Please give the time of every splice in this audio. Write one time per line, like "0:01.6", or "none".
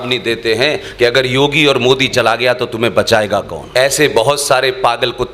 0:03.6